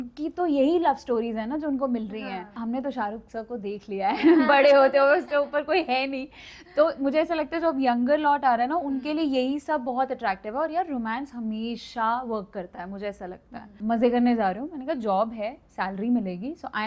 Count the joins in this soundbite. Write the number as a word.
two